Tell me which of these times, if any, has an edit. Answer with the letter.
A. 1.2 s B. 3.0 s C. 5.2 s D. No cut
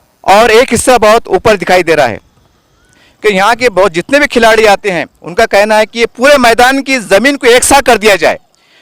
B